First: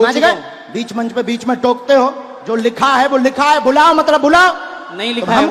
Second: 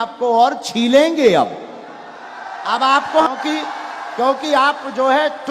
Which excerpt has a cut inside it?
second; 1 cut; at 3.3 s

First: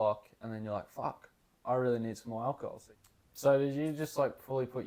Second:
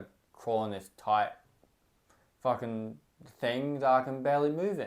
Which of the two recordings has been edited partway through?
first; 1 cut; at 2.8 s

